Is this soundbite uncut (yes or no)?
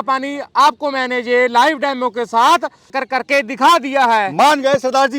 no